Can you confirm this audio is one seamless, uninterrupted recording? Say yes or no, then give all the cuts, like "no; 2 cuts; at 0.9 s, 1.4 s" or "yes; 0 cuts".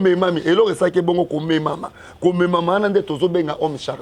yes; 0 cuts